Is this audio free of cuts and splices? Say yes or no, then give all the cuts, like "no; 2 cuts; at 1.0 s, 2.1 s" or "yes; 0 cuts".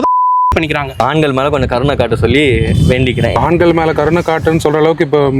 no; 2 cuts; at 1.0 s, 3.4 s